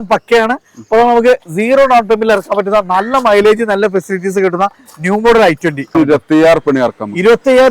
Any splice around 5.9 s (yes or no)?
yes